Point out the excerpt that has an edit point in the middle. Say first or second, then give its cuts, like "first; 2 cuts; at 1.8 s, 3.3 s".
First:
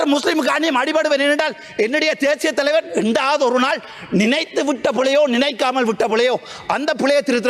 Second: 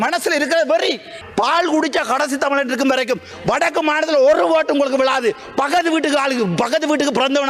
second; 1 cut; at 1.1 s